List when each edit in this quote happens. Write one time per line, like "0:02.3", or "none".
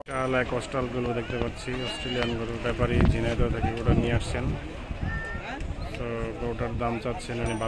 none